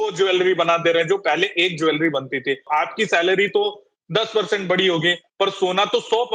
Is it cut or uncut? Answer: cut